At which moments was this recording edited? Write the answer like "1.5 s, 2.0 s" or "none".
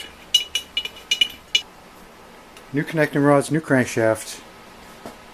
1.6 s